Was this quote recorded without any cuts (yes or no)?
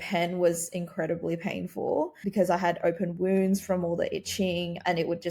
no